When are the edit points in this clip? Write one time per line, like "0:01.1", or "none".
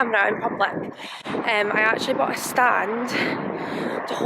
none